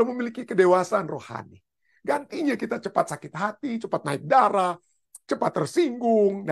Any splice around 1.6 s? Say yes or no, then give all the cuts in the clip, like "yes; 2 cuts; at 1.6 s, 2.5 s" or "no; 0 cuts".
no; 0 cuts